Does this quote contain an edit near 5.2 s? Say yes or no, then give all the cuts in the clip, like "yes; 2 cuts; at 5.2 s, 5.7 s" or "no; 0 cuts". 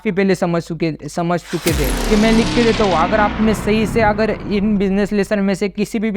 no; 1 cut; at 2.1 s